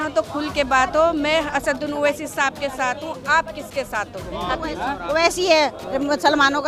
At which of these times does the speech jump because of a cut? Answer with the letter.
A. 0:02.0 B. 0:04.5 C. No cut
B